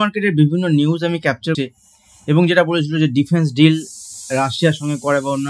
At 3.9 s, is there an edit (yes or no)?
no